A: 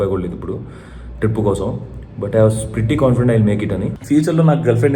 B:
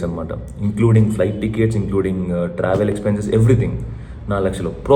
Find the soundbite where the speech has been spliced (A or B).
A